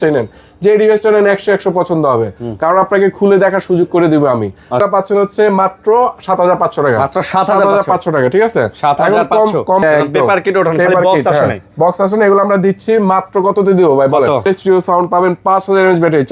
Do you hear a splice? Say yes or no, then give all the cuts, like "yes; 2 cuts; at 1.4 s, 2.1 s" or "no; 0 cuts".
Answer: yes; 3 cuts; at 4.8 s, 9.8 s, 14.5 s